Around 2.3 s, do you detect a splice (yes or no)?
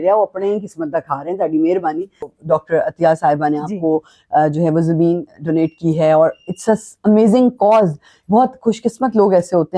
yes